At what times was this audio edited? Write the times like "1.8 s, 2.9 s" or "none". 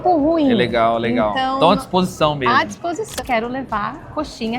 3.1 s